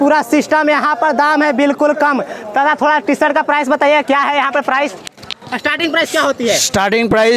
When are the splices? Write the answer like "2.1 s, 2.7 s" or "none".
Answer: none